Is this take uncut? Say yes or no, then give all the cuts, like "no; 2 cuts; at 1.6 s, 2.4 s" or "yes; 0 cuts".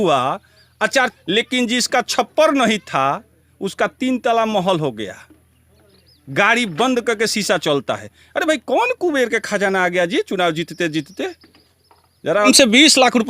no; 2 cuts; at 1.1 s, 12.5 s